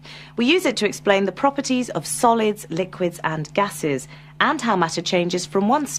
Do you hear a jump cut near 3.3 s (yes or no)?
no